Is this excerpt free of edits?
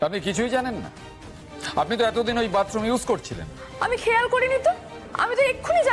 yes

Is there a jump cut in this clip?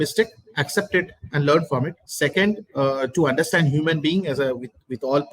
yes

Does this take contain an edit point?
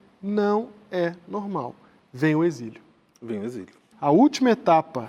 yes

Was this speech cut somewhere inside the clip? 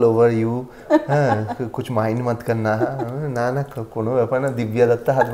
no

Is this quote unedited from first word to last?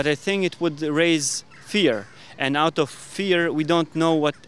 yes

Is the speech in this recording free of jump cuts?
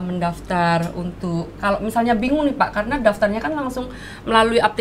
yes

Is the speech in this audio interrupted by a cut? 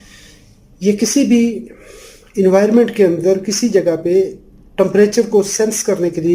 no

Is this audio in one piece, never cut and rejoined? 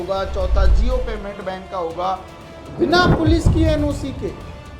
no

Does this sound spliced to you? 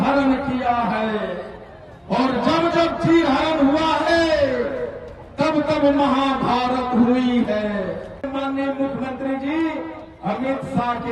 yes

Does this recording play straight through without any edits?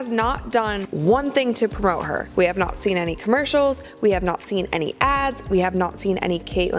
yes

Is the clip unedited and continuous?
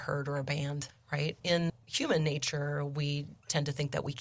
no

